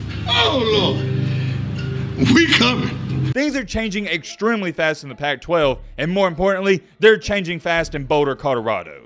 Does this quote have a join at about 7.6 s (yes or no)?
no